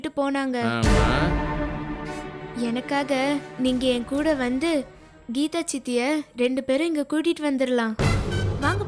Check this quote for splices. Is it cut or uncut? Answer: uncut